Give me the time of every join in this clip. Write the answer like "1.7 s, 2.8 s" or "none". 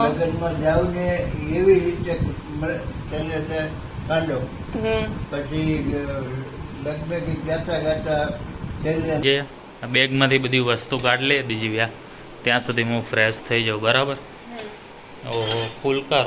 9.2 s